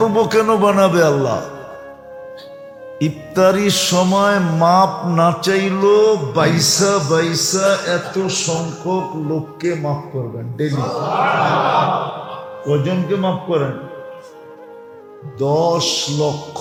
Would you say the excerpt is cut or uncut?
uncut